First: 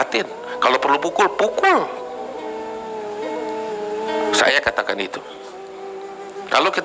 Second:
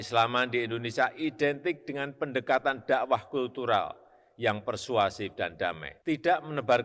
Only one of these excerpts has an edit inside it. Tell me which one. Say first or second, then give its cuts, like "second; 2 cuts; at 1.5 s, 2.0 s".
second; 1 cut; at 5.9 s